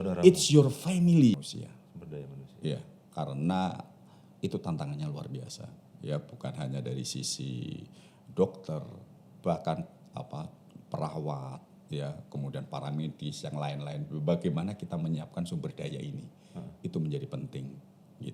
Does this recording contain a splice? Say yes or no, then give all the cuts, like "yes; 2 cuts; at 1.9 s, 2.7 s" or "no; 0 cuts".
yes; 1 cut; at 1.3 s